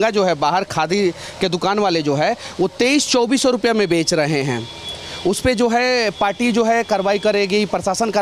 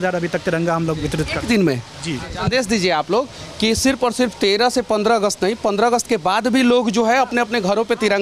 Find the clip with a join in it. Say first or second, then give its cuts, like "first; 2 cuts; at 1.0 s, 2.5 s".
second; 1 cut; at 2.3 s